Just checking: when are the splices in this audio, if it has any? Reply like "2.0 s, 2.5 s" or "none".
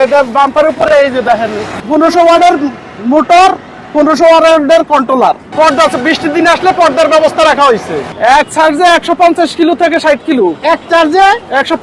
1.8 s, 5.5 s, 8.1 s